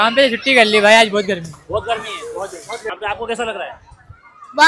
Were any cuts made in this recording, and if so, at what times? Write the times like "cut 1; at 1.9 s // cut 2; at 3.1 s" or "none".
cut 1; at 2.9 s